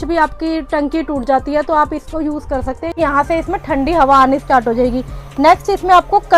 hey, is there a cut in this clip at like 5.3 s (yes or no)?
no